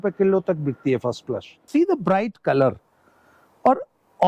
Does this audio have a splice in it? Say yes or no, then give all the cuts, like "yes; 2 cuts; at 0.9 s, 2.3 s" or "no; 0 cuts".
yes; 1 cut; at 1.6 s